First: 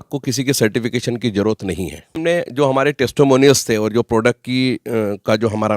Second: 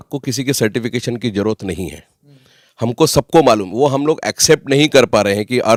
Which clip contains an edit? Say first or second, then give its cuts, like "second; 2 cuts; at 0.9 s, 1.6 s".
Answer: first; 1 cut; at 2.1 s